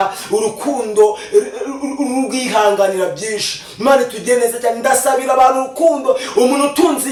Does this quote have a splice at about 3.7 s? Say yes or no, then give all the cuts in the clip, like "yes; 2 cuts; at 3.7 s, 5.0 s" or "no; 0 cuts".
no; 0 cuts